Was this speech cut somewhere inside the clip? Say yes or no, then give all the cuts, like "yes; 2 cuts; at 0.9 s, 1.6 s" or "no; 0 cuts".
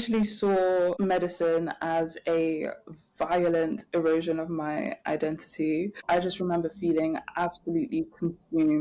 yes; 2 cuts; at 1.0 s, 6.0 s